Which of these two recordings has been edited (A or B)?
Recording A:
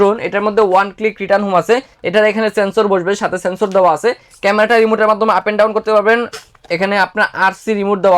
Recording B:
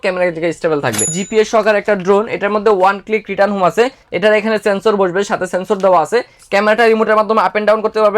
B